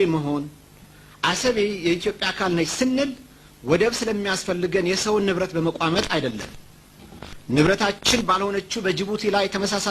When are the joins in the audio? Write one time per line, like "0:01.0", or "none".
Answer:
none